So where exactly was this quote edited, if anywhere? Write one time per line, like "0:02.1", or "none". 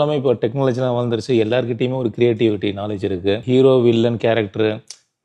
0:03.4